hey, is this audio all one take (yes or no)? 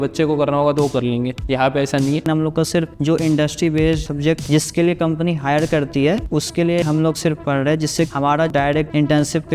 no